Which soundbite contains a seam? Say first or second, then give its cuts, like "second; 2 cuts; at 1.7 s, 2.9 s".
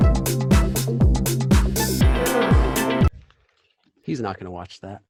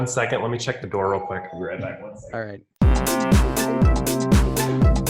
second; 1 cut; at 2.6 s